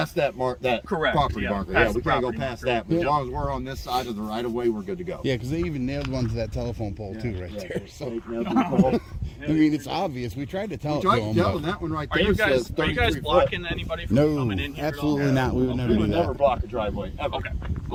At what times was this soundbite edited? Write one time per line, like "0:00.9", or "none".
none